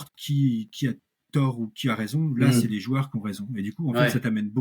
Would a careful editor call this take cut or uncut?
uncut